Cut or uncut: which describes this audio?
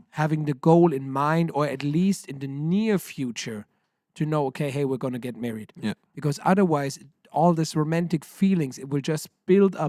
uncut